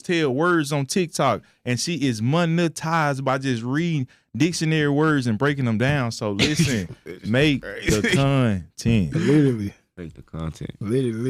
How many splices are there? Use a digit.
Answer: 0